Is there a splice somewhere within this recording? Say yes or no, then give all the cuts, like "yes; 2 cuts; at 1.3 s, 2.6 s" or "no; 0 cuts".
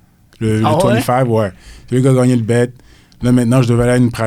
no; 0 cuts